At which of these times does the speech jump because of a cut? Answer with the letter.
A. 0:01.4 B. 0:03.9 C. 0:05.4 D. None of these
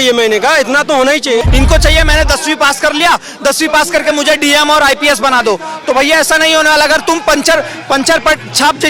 A